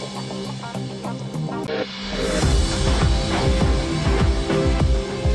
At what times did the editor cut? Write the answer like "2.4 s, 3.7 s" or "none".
1.7 s